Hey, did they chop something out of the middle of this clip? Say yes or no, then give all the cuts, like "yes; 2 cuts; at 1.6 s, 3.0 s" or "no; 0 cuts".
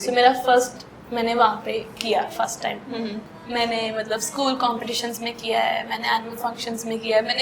yes; 1 cut; at 3.2 s